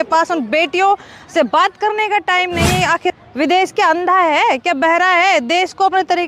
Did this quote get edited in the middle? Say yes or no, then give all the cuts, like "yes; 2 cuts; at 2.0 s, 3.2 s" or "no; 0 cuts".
yes; 1 cut; at 3.2 s